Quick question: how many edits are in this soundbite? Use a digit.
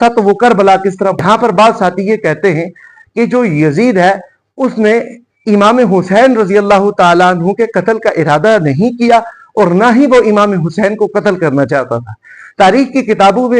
1